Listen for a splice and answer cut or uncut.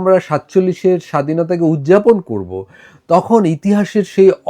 uncut